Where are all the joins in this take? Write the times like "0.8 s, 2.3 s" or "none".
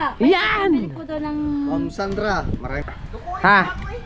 2.9 s